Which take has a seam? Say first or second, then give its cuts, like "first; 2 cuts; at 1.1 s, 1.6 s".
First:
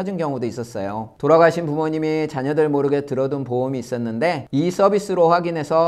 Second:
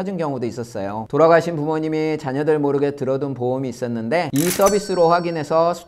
second; 2 cuts; at 1.0 s, 4.3 s